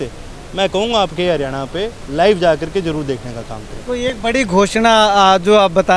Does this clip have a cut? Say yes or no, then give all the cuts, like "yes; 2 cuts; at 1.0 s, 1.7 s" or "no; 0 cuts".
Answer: no; 0 cuts